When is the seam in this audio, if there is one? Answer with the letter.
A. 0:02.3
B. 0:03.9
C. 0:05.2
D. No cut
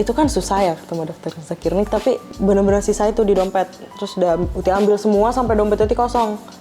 A